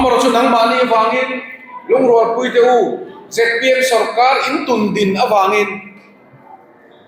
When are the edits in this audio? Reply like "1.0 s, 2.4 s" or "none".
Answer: none

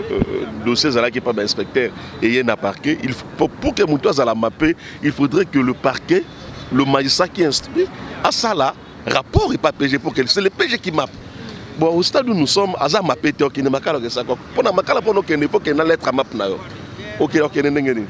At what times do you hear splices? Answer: none

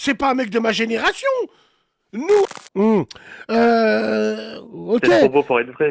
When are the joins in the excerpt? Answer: 2.5 s

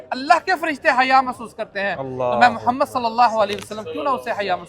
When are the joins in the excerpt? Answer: none

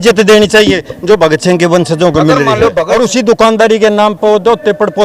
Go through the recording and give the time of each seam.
2.9 s

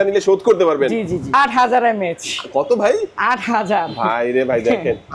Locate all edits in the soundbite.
1.3 s

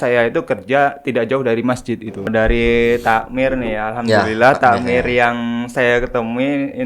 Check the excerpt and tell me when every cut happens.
2.3 s

